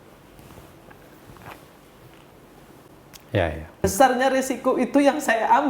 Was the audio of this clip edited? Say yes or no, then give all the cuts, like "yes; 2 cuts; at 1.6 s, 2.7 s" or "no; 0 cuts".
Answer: yes; 1 cut; at 3.8 s